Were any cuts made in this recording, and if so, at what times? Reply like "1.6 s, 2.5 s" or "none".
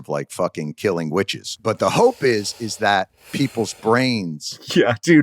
1.5 s, 3.2 s